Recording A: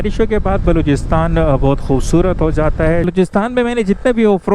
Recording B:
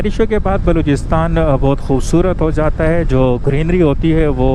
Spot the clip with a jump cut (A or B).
A